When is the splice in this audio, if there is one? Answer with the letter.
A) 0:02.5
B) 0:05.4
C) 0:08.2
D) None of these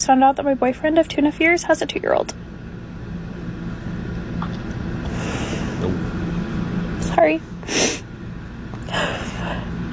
D